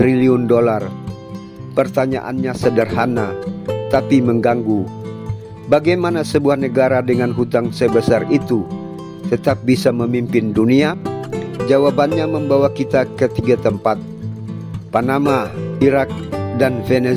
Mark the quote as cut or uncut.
uncut